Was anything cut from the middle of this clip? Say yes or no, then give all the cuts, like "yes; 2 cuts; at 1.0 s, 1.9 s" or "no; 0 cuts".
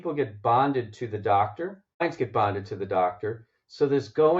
yes; 1 cut; at 2.0 s